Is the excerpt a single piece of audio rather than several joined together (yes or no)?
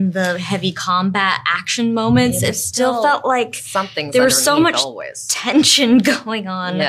yes